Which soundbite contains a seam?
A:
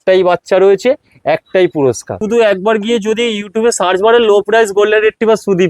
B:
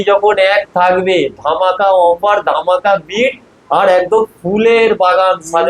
A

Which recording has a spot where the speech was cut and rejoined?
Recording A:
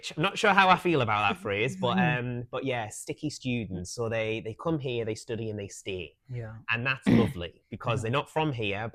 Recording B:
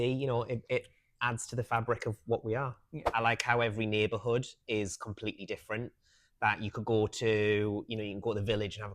B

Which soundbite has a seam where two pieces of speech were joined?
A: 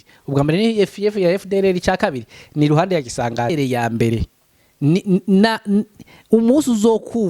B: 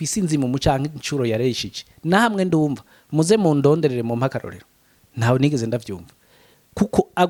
A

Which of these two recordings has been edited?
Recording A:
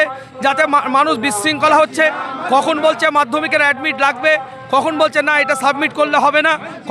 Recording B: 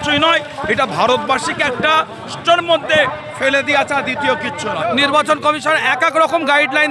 B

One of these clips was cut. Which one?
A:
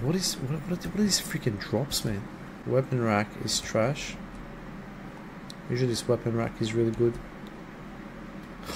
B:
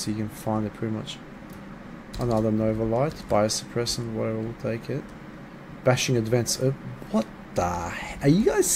A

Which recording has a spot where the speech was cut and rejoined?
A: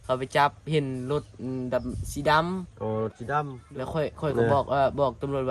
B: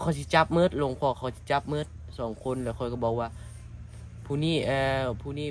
A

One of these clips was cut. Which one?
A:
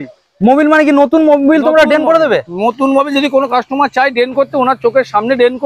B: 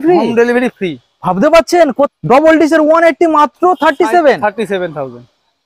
B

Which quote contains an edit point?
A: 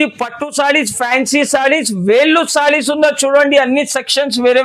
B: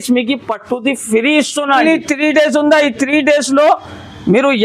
B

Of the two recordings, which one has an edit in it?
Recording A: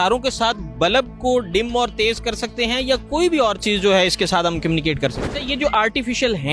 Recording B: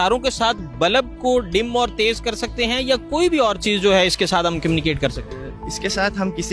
A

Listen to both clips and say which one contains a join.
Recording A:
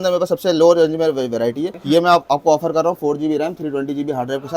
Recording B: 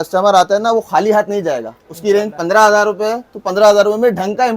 A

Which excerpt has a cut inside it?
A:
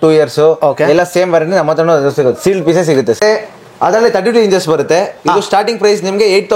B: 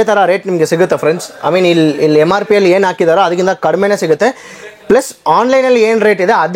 A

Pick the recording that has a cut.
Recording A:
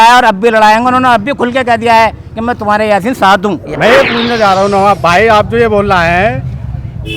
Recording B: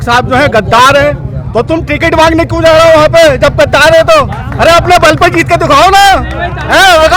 A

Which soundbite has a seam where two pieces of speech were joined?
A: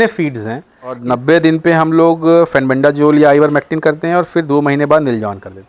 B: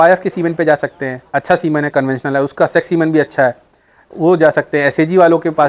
A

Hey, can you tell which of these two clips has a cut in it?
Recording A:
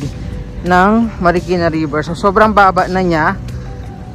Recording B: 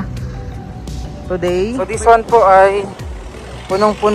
B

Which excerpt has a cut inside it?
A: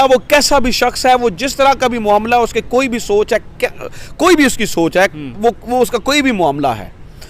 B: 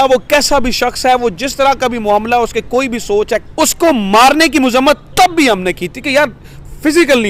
B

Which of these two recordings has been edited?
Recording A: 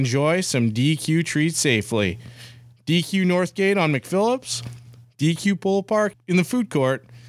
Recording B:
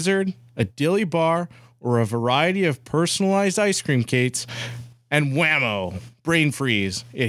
A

